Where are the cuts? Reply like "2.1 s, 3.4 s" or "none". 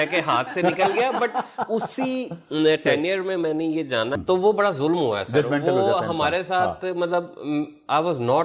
4.2 s